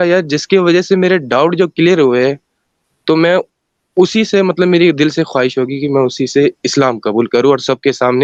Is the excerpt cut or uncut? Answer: uncut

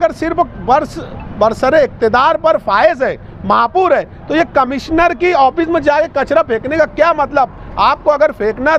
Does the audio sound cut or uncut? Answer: uncut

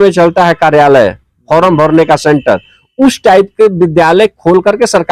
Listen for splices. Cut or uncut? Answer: uncut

